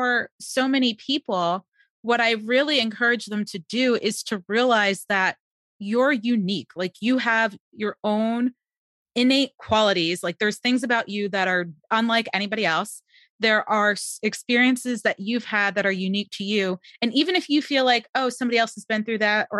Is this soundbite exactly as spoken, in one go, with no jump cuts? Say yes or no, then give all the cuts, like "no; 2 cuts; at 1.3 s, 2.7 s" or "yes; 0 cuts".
yes; 0 cuts